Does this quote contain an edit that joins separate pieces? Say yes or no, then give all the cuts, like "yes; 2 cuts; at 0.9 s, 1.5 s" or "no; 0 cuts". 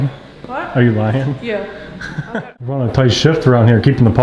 yes; 1 cut; at 2.3 s